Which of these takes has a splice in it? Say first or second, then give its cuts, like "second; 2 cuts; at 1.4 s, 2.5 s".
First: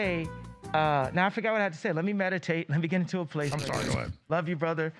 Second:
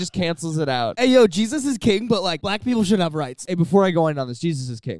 second; 3 cuts; at 0.9 s, 2.4 s, 3.5 s